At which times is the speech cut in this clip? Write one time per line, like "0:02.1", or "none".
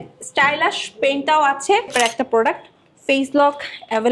0:01.9